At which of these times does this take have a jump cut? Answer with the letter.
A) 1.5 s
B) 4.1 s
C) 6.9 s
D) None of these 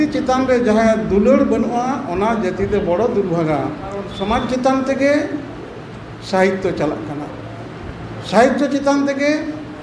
B